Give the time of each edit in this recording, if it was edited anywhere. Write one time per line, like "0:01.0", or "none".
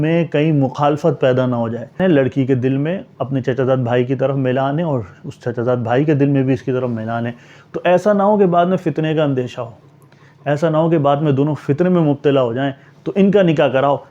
0:02.0